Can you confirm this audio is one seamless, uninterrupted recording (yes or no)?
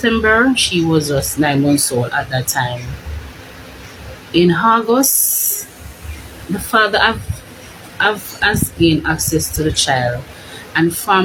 yes